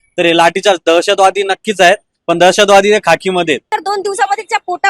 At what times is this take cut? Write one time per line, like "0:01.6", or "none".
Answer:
0:03.7